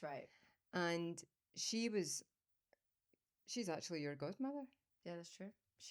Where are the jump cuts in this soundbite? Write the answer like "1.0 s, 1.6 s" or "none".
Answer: none